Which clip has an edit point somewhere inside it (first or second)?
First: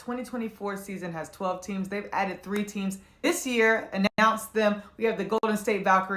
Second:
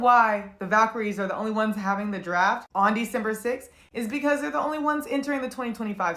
first